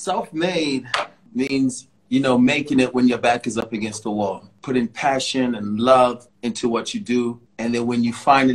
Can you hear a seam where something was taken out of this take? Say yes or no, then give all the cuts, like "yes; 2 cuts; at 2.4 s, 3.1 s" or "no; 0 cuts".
yes; 5 cuts; at 1.2 s, 1.9 s, 4.5 s, 6.3 s, 7.5 s